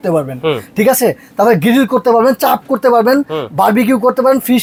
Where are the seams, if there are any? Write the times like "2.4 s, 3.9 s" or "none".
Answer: none